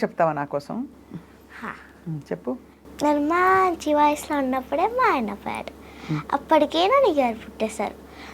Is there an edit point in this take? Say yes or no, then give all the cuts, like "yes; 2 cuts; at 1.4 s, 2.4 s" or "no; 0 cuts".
no; 0 cuts